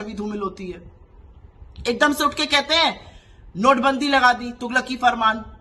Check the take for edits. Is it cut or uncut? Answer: uncut